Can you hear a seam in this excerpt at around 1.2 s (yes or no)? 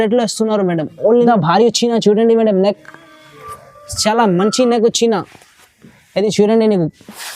yes